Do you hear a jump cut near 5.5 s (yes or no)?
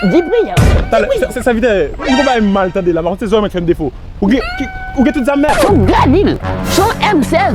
yes